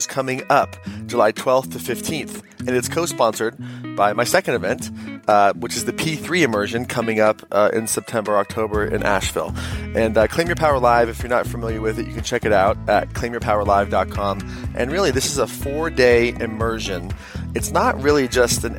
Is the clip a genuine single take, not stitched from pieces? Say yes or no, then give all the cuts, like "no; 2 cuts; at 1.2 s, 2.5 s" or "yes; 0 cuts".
yes; 0 cuts